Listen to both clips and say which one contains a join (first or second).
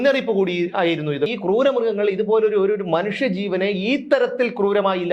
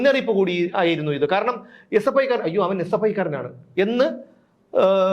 first